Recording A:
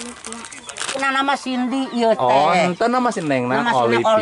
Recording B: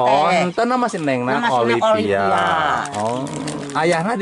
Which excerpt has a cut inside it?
A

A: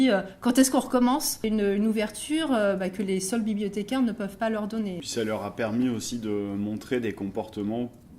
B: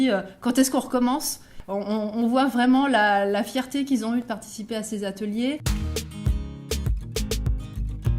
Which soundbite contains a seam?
A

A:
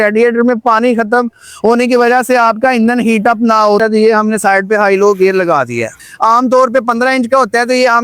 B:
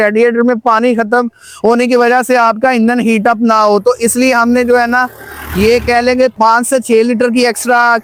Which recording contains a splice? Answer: A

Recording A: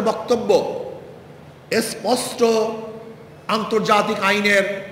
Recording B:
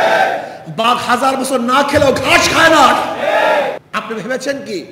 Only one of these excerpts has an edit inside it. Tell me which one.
B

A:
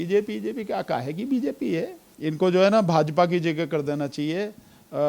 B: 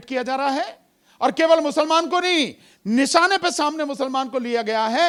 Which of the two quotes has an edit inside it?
A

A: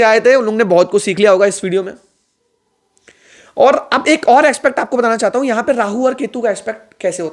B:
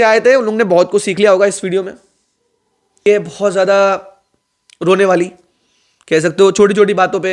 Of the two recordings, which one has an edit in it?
B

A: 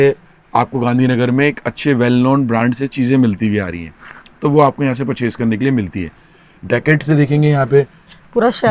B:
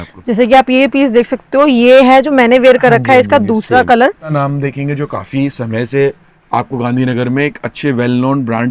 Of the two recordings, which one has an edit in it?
B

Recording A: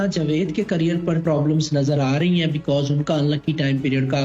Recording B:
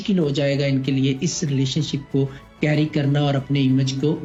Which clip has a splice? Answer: A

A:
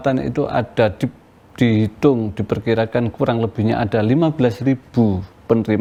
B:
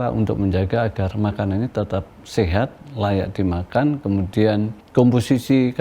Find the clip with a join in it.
B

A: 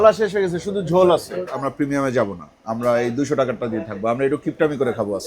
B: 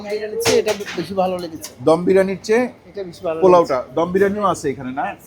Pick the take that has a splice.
A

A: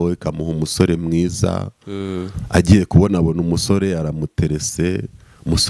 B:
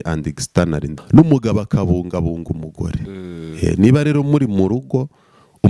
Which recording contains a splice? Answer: B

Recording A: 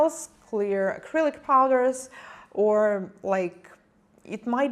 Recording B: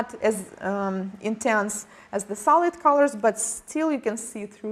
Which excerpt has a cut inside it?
A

